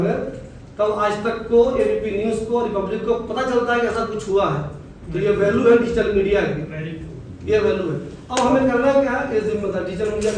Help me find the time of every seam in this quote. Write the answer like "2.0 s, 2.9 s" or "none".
none